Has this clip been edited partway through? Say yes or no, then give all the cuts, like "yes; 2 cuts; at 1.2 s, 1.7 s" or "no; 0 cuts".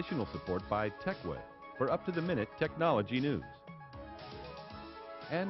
no; 0 cuts